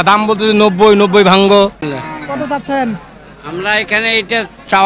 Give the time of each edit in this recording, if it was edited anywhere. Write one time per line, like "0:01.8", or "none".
0:01.8